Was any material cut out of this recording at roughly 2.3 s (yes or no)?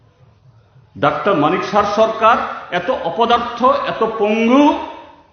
yes